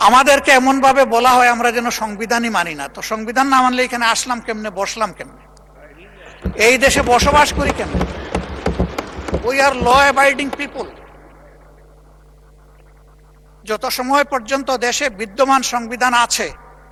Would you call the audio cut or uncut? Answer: uncut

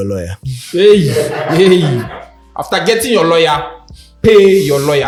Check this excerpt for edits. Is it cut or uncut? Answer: uncut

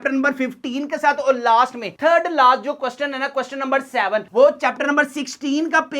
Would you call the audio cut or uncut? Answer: uncut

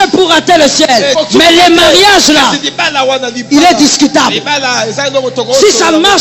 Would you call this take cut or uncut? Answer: cut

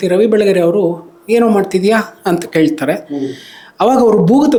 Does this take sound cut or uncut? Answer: uncut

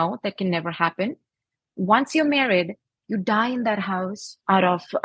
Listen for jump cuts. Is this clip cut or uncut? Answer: uncut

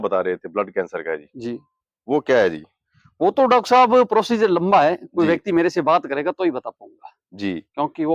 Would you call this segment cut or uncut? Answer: uncut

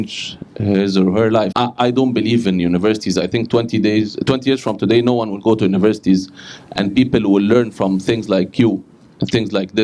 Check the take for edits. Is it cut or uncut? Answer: cut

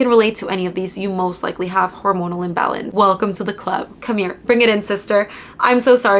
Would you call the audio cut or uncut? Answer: cut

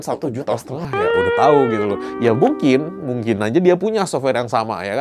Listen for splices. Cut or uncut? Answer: uncut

